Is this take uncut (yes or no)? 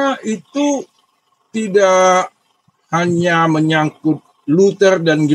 yes